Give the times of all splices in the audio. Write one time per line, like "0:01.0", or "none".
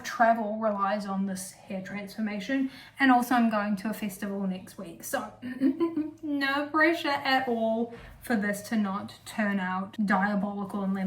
0:09.9